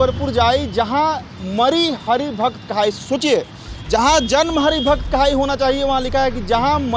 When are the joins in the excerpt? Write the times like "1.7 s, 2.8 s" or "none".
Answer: none